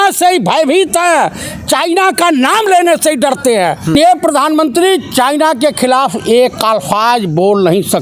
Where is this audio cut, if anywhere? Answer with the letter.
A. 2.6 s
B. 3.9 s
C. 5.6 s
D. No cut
B